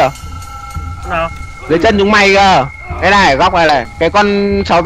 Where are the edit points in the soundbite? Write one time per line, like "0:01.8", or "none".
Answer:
0:03.9